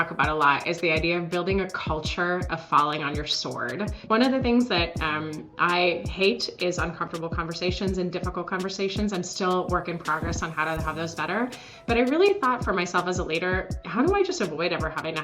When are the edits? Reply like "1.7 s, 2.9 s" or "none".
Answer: 4.0 s